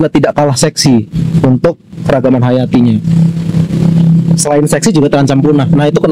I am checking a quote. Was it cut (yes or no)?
no